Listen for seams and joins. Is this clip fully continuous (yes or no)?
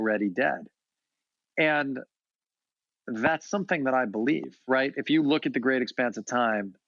no